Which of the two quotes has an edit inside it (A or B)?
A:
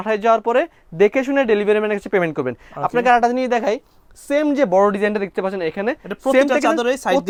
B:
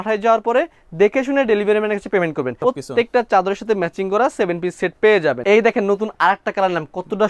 B